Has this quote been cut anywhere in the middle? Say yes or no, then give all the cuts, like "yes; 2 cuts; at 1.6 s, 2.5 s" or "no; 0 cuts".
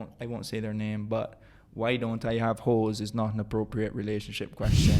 no; 0 cuts